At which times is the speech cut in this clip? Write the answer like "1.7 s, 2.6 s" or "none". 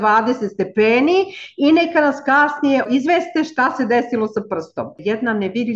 2.9 s, 5.0 s